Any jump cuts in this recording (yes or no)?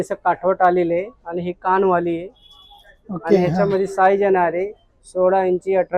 no